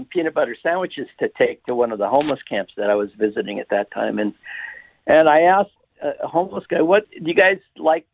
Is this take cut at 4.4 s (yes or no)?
no